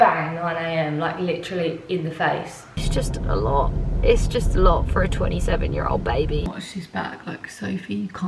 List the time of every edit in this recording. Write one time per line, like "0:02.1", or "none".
0:02.8
0:06.5